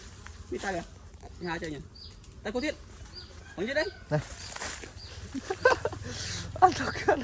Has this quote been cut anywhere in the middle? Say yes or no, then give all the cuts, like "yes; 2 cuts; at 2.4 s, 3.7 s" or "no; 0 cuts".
no; 0 cuts